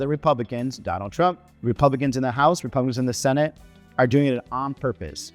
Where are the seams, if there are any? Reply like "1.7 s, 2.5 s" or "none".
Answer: 1.5 s